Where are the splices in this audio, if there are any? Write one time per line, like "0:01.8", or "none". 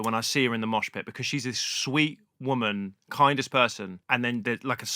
0:03.9